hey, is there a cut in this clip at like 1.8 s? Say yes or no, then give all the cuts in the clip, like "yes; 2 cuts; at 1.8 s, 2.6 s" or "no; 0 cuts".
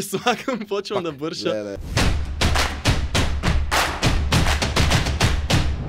yes; 1 cut; at 1.8 s